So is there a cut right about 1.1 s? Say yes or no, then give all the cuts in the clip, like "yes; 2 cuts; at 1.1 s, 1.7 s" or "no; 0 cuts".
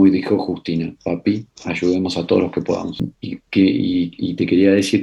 no; 1 cut; at 3.1 s